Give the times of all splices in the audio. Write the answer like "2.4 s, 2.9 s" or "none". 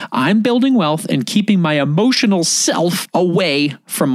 3.0 s